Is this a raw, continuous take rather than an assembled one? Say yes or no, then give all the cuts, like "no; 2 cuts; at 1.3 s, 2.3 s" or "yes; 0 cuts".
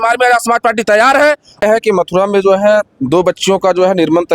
no; 1 cut; at 1.6 s